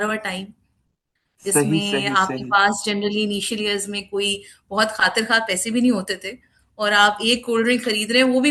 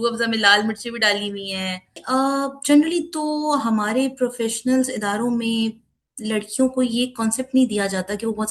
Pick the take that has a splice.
second; 1 cut; at 2.0 s

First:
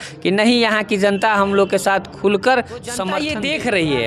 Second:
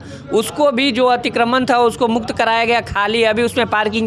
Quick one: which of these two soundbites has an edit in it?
first; 1 cut; at 3.2 s

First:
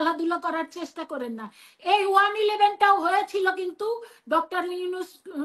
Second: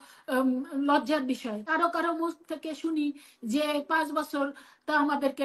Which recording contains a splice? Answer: second; 1 cut; at 1.6 s

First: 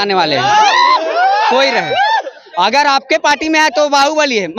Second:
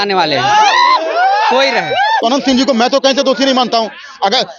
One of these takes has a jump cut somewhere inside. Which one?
second; 1 cut; at 2.2 s

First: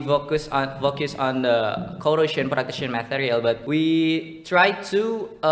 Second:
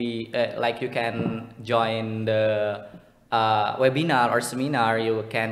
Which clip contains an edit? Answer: first; 1 cut; at 3.6 s

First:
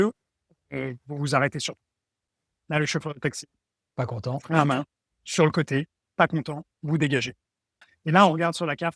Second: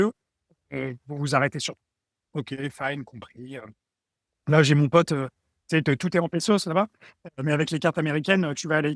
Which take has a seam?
first; 2 cuts; at 2.2 s, 7.8 s

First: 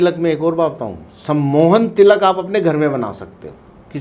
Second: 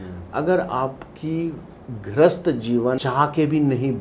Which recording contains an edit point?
second; 1 cut; at 3.0 s

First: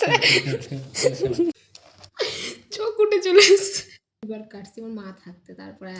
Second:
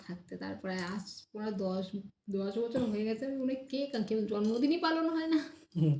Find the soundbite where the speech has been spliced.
first; 1 cut; at 4.2 s

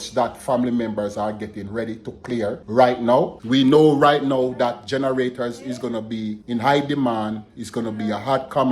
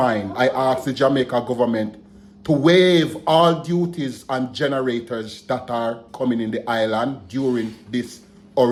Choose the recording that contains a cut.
first; 3 cuts; at 2.6 s, 3.4 s, 6.4 s

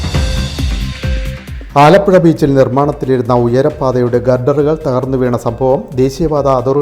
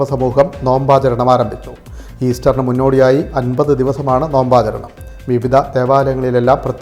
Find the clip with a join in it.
first; 1 cut; at 1.3 s

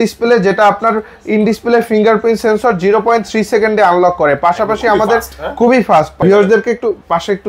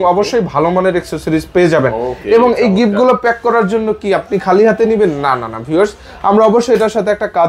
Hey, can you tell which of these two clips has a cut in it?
first; 1 cut; at 6.2 s

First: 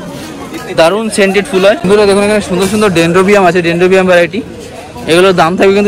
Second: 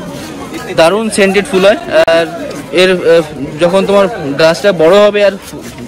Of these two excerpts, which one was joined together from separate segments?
first; 1 cut; at 1.8 s

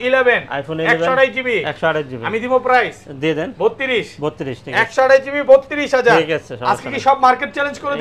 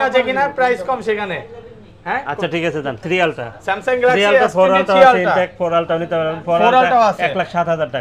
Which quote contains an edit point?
second; 1 cut; at 3.0 s

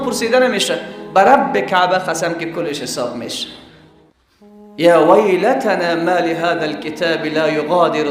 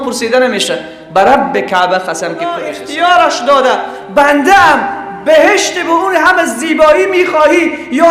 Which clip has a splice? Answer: second; 1 cut; at 2.8 s

